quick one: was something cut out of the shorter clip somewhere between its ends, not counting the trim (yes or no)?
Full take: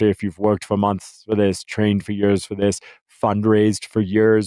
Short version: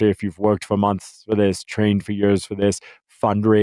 no